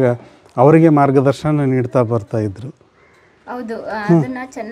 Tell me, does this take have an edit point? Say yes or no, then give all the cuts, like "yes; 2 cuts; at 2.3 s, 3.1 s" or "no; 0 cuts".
no; 0 cuts